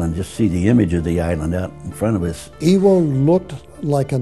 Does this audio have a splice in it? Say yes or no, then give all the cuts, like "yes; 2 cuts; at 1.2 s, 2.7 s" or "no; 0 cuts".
yes; 1 cut; at 2.5 s